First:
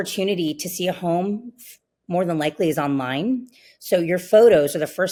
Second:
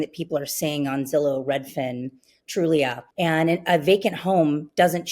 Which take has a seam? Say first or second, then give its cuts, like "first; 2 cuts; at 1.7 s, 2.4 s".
second; 1 cut; at 3.0 s